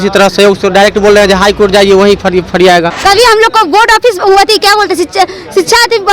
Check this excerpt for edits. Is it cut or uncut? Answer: cut